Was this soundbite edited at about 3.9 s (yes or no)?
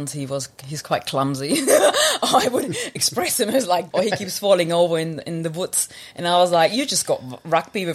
yes